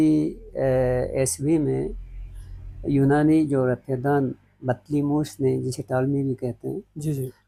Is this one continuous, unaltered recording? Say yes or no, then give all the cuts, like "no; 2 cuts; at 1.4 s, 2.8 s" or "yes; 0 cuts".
yes; 0 cuts